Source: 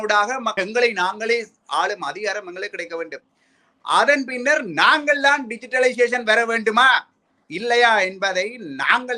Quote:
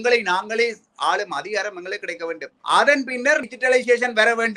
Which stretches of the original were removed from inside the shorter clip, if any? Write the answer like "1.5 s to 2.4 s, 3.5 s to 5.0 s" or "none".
3.2 s to 3.7 s, 4.7 s to 5.6 s